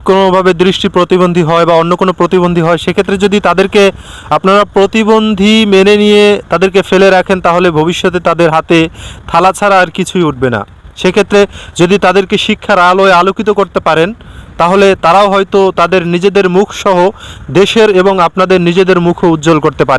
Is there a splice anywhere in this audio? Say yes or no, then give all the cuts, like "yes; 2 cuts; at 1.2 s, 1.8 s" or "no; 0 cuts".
no; 0 cuts